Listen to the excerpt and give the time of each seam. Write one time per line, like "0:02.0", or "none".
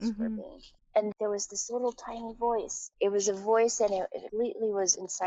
0:01.1
0:02.8
0:04.2